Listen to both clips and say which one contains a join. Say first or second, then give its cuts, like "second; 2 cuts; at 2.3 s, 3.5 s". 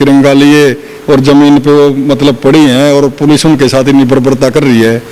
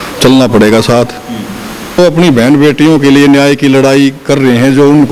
second; 1 cut; at 2.0 s